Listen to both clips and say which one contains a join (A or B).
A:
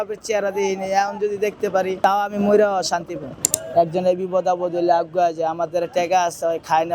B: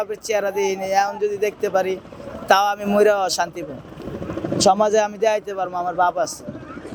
A